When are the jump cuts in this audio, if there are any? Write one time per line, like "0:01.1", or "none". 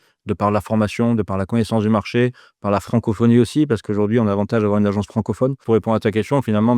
0:05.6